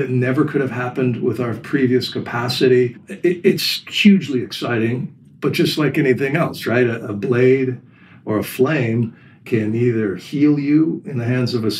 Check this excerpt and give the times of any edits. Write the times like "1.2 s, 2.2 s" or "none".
3.0 s

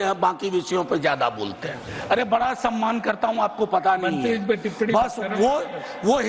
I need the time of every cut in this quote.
1.9 s

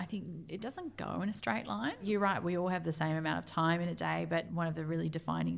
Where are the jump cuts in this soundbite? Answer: 2.0 s, 4.5 s

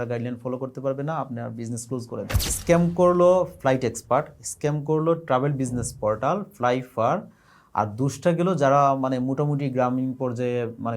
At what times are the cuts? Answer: 2.5 s

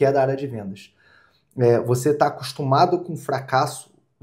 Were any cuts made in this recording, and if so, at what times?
none

